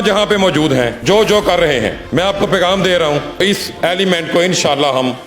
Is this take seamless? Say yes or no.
no